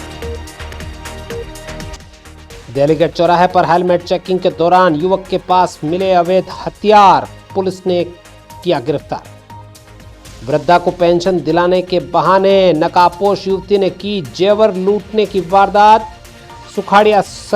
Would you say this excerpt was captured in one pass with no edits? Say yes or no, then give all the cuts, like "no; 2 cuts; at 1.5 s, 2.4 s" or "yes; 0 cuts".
no; 1 cut; at 1.9 s